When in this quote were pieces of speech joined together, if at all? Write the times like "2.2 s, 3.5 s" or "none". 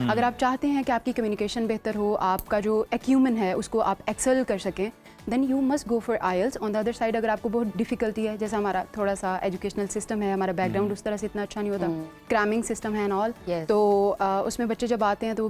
none

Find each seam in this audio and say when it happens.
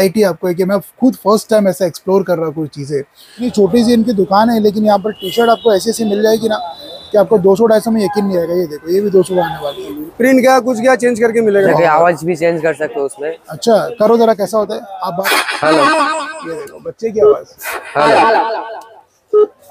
3.5 s, 10.3 s, 11.7 s, 15.2 s

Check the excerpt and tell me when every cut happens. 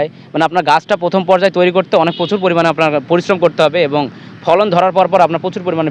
none

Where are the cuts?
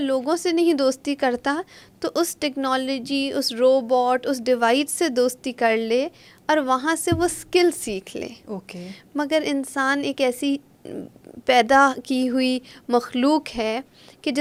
none

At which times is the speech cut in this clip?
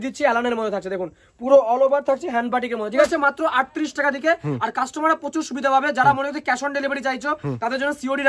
3.0 s

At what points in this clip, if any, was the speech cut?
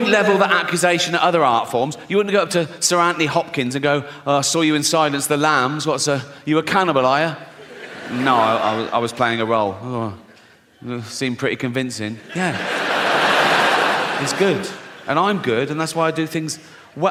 none

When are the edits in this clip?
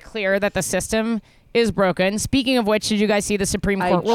none

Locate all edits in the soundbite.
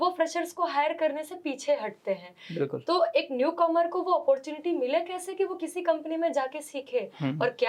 none

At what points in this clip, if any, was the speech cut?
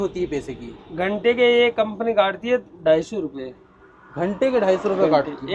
none

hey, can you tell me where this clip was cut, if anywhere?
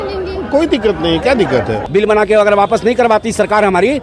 1.8 s

